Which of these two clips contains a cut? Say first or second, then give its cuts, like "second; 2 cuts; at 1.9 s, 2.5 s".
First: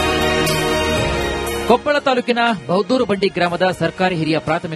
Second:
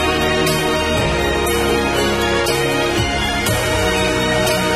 second; 1 cut; at 1.1 s